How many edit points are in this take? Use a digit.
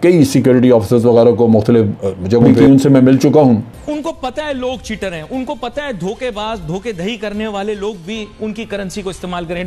2